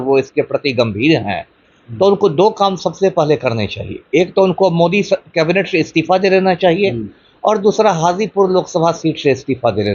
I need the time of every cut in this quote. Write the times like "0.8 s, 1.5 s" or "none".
none